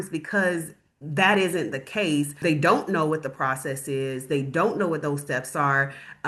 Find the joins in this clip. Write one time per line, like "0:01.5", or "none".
none